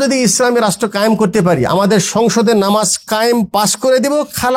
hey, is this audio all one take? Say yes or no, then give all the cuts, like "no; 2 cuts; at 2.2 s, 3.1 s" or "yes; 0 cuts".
yes; 0 cuts